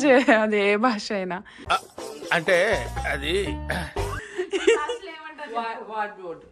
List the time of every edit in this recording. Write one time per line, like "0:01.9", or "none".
0:04.2